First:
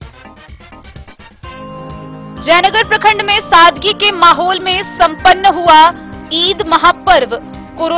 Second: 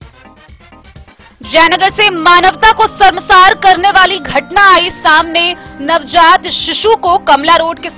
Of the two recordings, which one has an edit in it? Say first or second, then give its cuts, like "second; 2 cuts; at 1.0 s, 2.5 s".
first; 1 cut; at 0.9 s